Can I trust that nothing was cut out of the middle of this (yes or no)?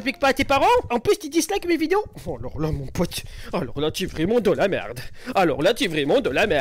yes